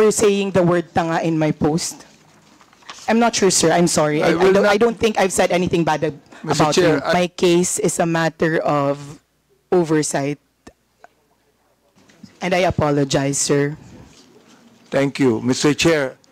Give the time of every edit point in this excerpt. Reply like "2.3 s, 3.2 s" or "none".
3.1 s, 7.1 s